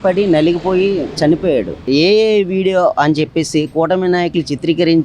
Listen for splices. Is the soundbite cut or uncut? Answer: cut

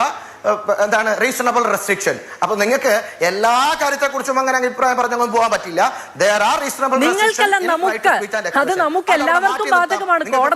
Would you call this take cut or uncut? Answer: uncut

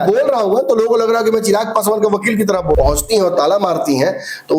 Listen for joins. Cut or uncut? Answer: cut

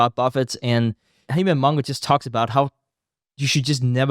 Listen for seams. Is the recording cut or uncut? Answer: cut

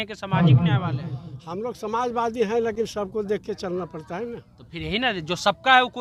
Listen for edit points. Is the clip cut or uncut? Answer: uncut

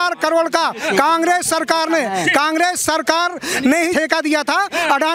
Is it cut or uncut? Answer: cut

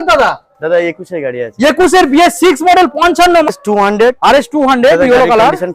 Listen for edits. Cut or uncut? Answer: cut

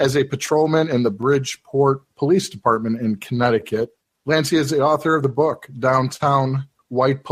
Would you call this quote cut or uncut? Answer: uncut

